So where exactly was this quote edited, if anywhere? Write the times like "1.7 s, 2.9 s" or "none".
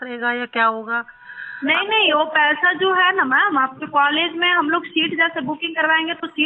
none